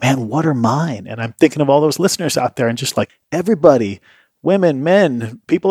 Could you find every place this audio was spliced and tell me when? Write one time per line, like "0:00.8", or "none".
0:03.2